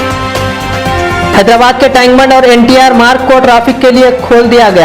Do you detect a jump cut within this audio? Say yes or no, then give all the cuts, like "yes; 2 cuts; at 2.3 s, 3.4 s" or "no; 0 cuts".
yes; 1 cut; at 1.3 s